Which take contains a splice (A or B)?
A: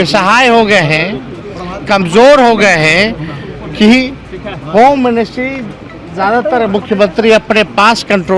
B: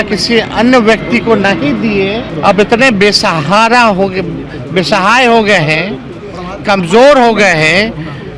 B